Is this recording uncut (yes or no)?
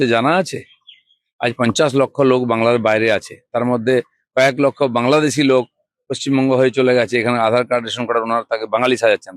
yes